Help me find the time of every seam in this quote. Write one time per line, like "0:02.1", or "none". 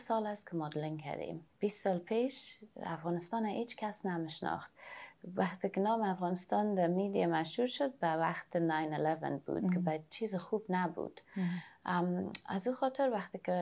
0:01.4